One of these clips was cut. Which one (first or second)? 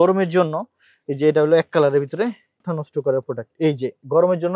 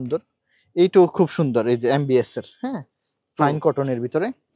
first